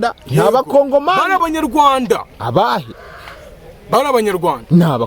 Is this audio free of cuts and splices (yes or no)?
yes